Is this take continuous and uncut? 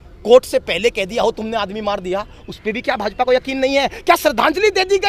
yes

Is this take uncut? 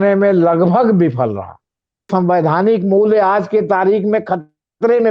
no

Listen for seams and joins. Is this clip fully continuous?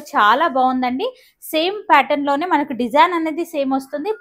yes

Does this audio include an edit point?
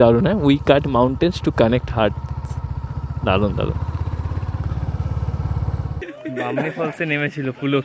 yes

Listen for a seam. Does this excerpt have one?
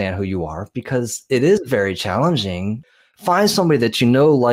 yes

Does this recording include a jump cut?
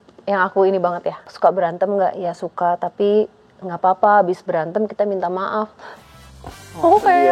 yes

